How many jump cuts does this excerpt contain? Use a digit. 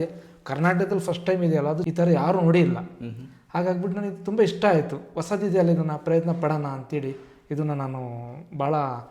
1